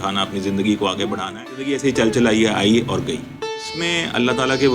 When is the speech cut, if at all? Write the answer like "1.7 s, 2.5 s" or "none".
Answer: 1.7 s, 3.7 s

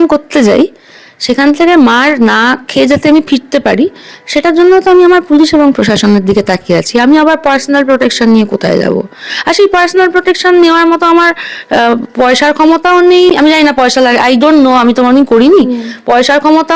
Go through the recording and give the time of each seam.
none

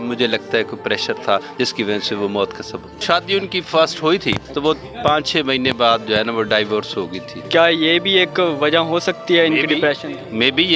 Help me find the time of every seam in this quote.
3.0 s, 4.5 s, 7.4 s

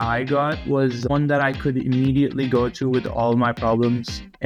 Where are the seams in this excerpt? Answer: none

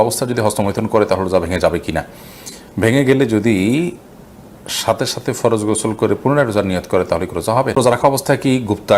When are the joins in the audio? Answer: 7.8 s

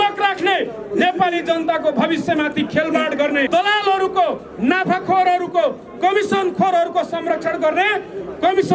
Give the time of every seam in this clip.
3.5 s

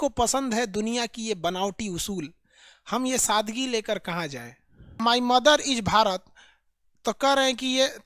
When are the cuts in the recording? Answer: 5.0 s

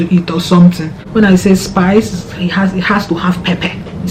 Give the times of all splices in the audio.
0.9 s

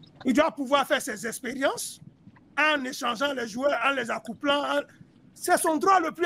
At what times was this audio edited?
none

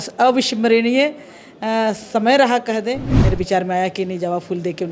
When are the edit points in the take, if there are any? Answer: 3.2 s

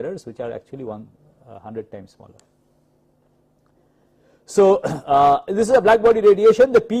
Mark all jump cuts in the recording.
3.5 s

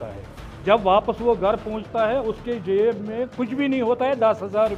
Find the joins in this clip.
none

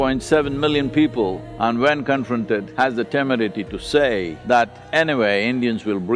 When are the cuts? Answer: 1.5 s, 2.7 s, 4.3 s

